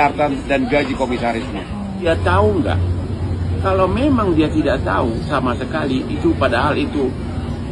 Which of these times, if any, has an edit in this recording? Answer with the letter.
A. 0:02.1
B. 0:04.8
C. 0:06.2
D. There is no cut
A